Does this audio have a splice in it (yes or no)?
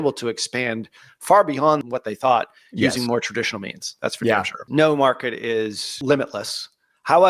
yes